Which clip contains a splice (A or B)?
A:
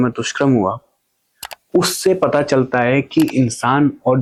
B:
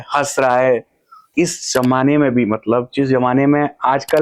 B